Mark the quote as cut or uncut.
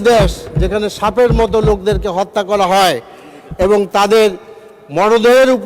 uncut